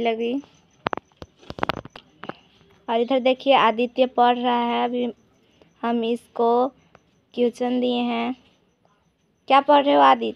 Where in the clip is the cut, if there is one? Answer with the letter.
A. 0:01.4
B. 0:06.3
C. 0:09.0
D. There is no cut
D